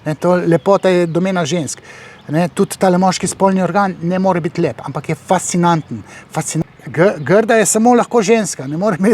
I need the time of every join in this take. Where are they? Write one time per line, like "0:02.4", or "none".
0:06.5